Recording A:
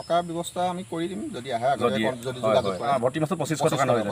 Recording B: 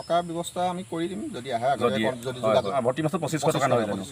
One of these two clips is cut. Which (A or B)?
B